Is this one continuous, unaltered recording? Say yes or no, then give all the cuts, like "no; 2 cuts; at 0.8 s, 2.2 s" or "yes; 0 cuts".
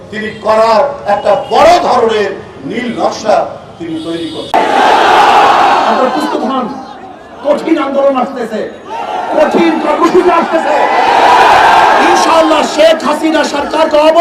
no; 1 cut; at 4.5 s